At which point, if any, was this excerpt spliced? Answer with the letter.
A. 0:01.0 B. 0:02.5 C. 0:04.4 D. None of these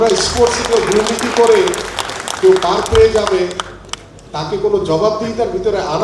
D